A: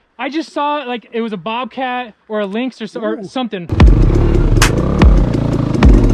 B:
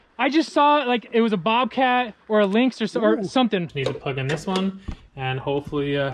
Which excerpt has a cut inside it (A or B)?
B